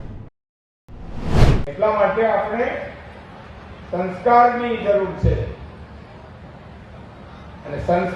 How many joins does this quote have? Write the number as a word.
one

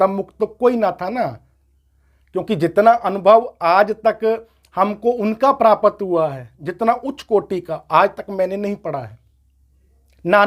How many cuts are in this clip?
zero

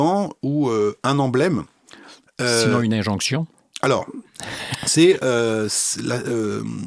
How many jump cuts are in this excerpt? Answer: zero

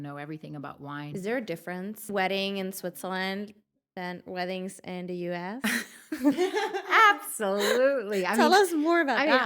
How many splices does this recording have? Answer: two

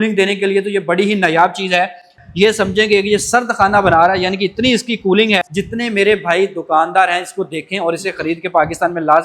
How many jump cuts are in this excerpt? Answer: two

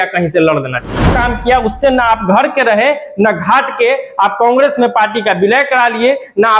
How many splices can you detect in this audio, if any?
one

